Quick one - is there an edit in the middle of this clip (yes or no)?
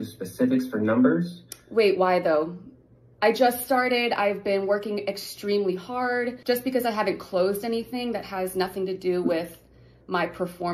no